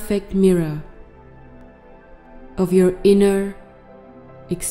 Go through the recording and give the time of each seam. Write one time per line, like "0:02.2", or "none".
0:00.9
0:02.6

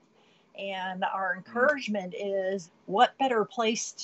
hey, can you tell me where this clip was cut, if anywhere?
0:02.6

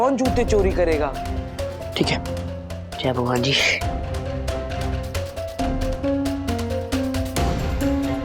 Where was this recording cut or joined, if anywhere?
none

